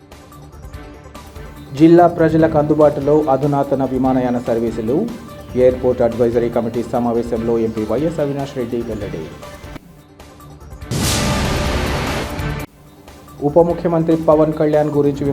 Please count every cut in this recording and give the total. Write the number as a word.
one